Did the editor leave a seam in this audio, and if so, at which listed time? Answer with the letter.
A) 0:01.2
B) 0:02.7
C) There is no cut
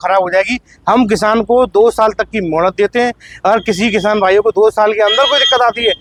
C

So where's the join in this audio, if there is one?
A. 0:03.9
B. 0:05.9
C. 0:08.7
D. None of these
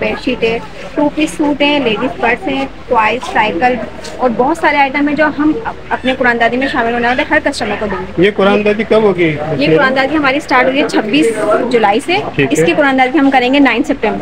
D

